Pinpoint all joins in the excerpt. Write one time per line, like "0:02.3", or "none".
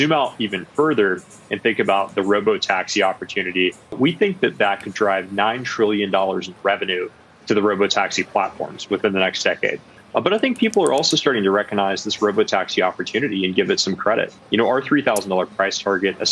0:03.9
0:09.9
0:14.4